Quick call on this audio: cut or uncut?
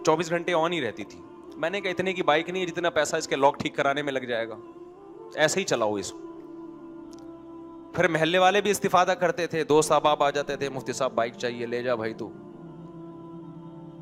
uncut